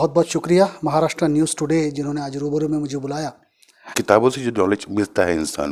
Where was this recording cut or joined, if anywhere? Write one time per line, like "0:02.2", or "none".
0:04.0